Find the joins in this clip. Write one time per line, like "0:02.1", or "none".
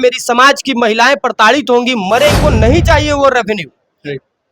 0:02.4